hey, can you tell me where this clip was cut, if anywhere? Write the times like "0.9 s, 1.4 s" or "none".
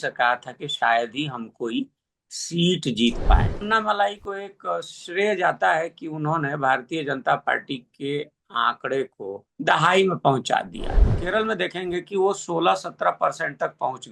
3.6 s, 9.4 s, 11.2 s